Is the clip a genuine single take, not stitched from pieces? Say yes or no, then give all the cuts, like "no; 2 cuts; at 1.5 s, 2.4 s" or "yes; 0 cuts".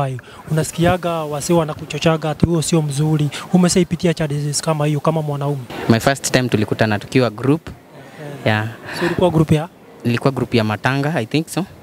no; 1 cut; at 5.7 s